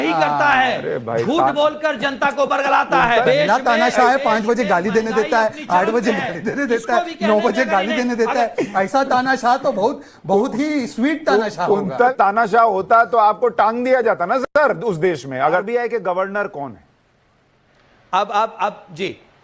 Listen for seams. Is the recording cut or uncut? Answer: cut